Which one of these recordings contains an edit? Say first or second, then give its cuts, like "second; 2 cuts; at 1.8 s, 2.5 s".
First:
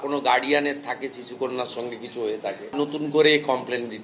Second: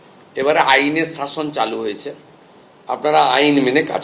first; 1 cut; at 3.0 s